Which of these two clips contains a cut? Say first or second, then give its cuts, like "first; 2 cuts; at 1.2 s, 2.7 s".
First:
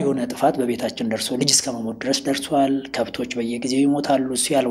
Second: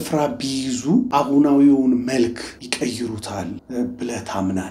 second; 3 cuts; at 1.1 s, 2.6 s, 3.6 s